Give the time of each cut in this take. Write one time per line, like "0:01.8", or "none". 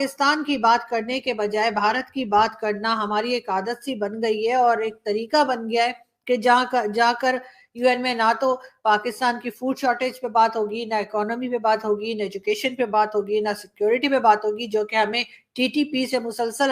none